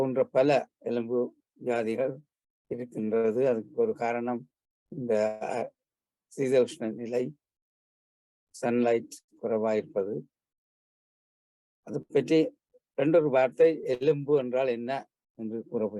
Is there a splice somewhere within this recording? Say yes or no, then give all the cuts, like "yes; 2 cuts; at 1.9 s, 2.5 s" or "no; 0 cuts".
no; 0 cuts